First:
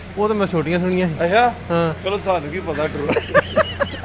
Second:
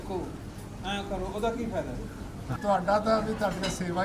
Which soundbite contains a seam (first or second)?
second